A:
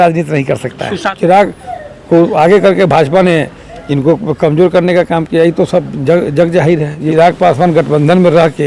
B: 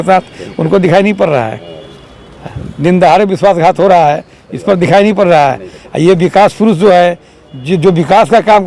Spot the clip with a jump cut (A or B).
A